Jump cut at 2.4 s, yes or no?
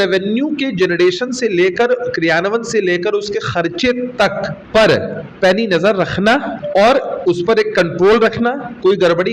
no